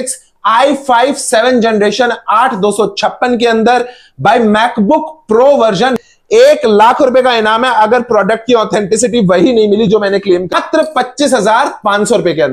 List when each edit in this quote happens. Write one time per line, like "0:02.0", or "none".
0:06.0
0:10.5